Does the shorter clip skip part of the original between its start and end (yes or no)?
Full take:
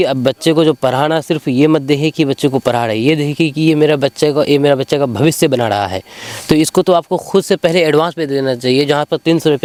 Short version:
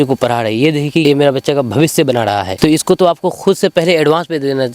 yes